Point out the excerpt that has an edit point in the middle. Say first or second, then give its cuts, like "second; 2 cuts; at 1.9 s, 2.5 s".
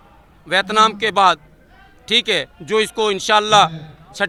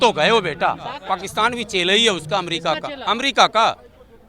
second; 1 cut; at 1.0 s